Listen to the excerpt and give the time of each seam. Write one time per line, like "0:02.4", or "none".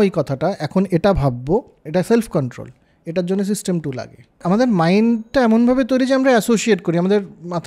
0:01.8
0:04.4